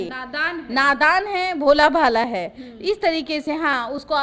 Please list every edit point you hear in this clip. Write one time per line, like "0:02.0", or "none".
none